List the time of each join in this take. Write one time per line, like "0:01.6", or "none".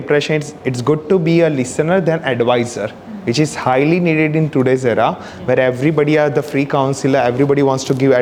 none